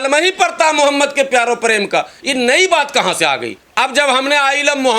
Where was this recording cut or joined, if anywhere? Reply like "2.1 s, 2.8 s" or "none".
3.6 s